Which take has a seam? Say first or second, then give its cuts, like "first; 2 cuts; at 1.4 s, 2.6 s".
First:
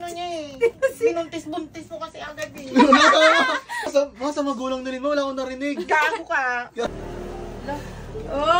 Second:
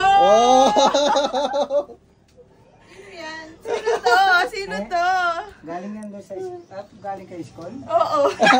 first; 2 cuts; at 3.9 s, 6.9 s